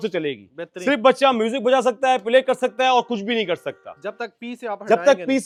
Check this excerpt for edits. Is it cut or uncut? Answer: uncut